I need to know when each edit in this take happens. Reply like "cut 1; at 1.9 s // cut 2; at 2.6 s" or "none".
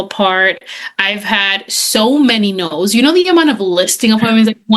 none